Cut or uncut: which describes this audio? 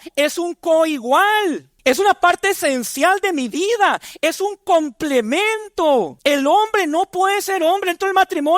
cut